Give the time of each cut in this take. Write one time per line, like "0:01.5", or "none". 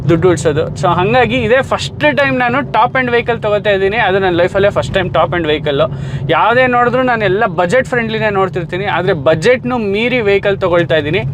none